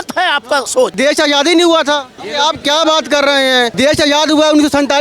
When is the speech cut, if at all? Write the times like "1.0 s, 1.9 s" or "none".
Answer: 0.9 s, 2.1 s, 3.7 s

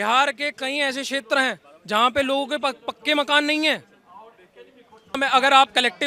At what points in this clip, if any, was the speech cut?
5.2 s

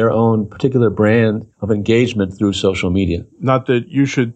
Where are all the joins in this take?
none

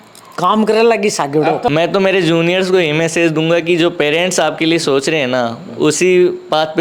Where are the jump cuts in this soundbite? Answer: 1.6 s

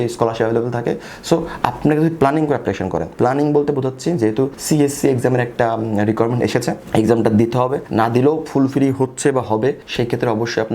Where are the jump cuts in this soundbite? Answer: 3.1 s, 4.6 s, 7.8 s, 9.8 s

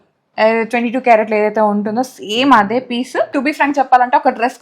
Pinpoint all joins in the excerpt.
3.3 s

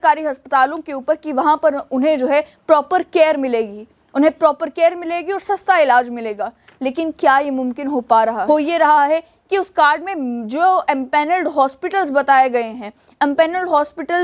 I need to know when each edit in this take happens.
8.4 s

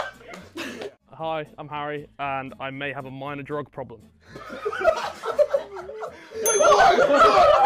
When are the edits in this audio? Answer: 0.9 s

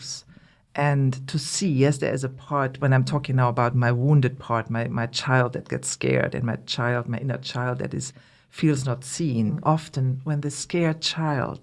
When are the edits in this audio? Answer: 9.6 s

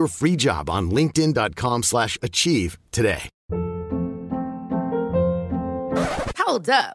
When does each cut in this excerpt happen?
3.3 s

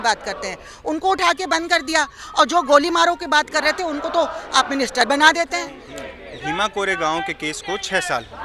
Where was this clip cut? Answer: 5.8 s

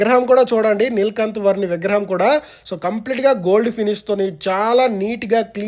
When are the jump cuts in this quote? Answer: none

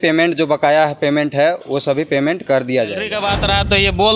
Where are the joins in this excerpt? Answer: 3.1 s

